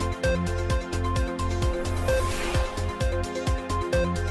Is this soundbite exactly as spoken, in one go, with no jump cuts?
no; 1 cut; at 2.2 s

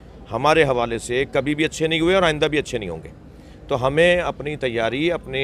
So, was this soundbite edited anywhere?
no; 0 cuts

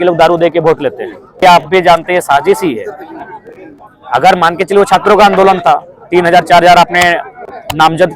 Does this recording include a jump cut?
yes; 1 cut; at 1.4 s

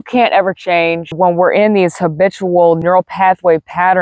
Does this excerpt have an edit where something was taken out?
yes; 2 cuts; at 1.2 s, 2.8 s

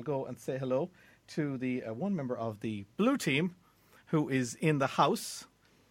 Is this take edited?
no; 0 cuts

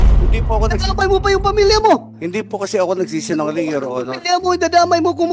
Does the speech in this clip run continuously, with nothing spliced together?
yes; 0 cuts

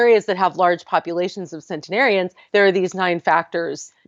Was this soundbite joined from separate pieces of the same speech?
no; 0 cuts

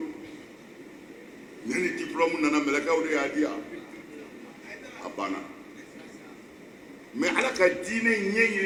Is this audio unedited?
yes; 0 cuts

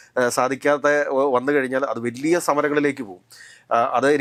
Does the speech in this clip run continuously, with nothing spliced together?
yes; 0 cuts

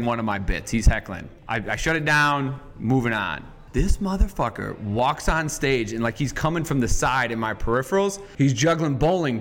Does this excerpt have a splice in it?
yes; 2 cuts; at 3.7 s, 8.2 s

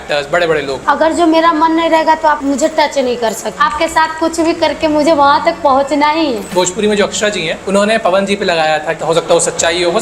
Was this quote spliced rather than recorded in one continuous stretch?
yes; 6 cuts; at 0.8 s, 2.4 s, 3.5 s, 6.5 s, 7.5 s, 9.0 s

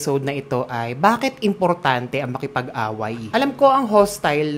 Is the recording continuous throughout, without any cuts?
yes; 0 cuts

